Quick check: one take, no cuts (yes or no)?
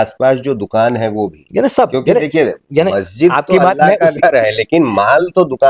yes